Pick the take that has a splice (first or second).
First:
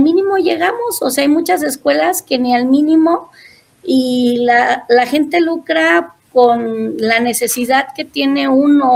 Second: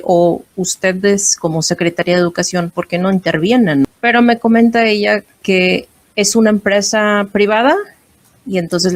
second